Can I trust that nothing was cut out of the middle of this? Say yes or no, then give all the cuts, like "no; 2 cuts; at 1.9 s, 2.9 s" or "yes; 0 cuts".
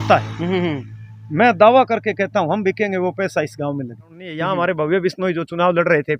no; 1 cut; at 4.4 s